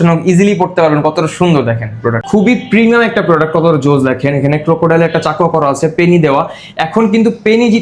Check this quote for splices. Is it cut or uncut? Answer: cut